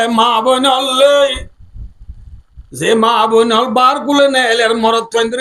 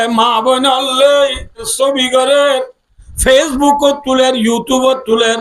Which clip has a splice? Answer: second; 1 cut; at 1.7 s

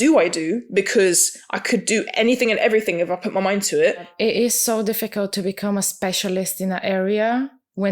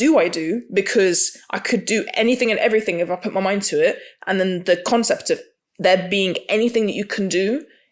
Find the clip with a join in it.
first; 1 cut; at 4.1 s

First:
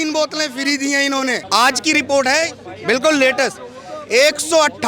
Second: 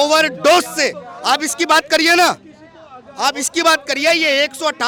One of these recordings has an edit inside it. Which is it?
first; 1 cut; at 1.4 s

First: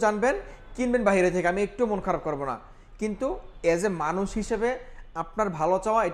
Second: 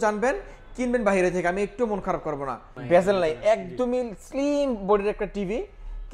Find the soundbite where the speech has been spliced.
second; 1 cut; at 2.7 s

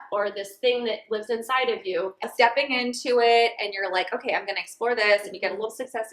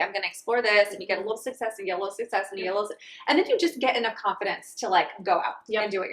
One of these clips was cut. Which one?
first; 1 cut; at 2.3 s

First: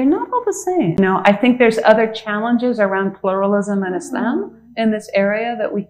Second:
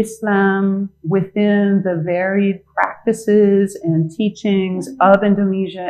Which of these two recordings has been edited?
first; 1 cut; at 1.0 s

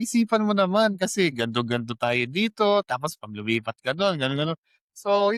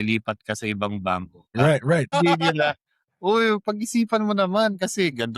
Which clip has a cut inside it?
second; 2 cuts; at 1.4 s, 2.1 s

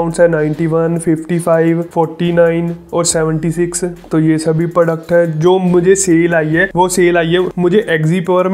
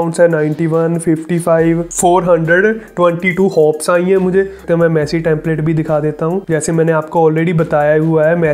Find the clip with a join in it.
second; 2 cuts; at 1.9 s, 4.6 s

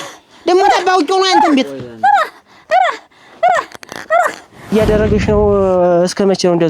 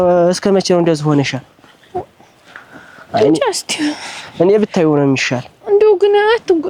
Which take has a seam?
first; 1 cut; at 4.7 s

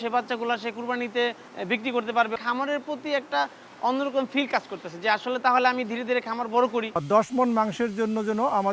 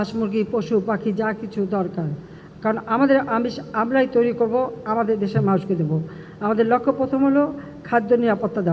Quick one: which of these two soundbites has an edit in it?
first; 3 cuts; at 1.5 s, 2.3 s, 6.9 s

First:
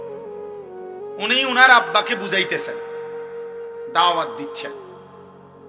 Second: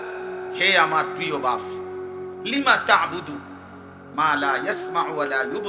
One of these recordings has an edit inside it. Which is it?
first; 1 cut; at 1.3 s

